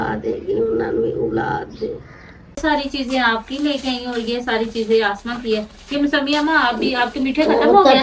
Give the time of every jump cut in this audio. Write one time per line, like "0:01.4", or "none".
0:02.6